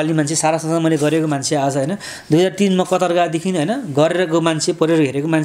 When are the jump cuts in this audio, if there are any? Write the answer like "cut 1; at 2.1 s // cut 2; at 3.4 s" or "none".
none